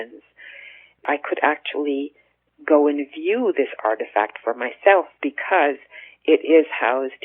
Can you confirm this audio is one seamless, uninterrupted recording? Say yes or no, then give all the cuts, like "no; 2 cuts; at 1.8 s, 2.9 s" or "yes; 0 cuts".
no; 1 cut; at 1.0 s